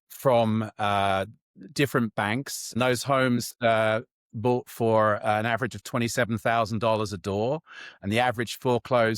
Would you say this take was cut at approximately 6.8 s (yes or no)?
no